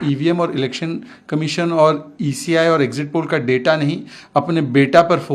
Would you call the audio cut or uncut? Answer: uncut